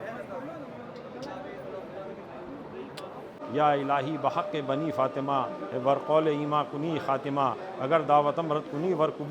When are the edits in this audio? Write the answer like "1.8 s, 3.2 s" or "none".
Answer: 3.4 s